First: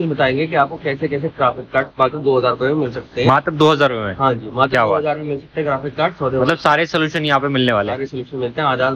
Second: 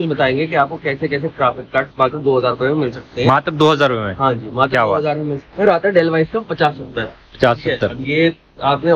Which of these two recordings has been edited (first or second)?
second